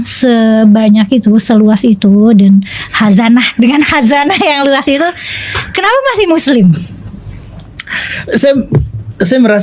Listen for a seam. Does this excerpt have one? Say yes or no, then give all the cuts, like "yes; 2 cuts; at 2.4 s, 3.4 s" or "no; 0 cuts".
no; 0 cuts